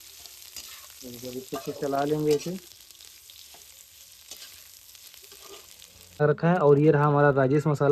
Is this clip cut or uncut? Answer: cut